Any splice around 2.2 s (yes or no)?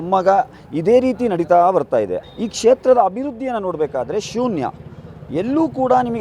yes